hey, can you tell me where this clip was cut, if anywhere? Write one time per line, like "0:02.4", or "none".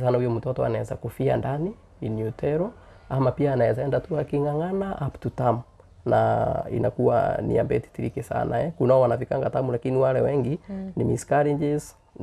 none